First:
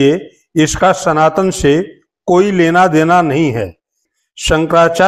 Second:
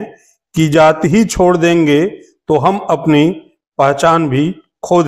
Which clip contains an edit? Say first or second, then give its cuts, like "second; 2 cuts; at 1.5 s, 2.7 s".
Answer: first; 1 cut; at 3.8 s